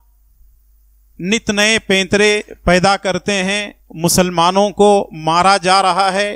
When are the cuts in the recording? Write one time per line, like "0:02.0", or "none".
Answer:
none